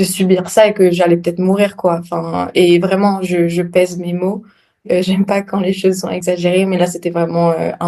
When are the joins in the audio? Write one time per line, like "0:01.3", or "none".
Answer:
0:04.8
0:06.1